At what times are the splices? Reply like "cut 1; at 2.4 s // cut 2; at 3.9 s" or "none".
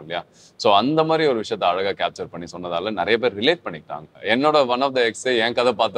cut 1; at 4.1 s